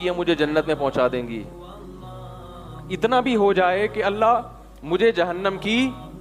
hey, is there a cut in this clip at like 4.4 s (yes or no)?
no